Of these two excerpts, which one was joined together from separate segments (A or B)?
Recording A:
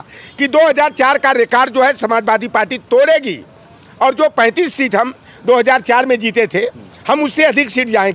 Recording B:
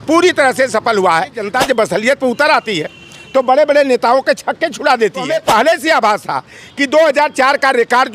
B